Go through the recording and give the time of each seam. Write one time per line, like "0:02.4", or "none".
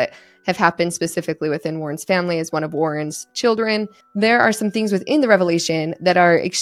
0:04.0